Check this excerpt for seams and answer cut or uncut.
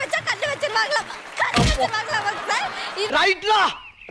uncut